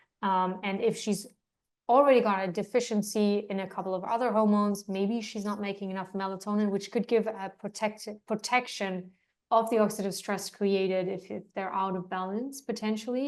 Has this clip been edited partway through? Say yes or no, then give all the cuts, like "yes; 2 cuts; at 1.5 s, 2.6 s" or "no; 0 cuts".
no; 0 cuts